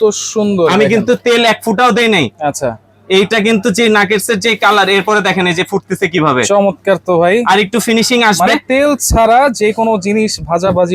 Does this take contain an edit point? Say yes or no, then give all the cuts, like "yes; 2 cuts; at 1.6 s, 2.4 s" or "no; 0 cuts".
no; 0 cuts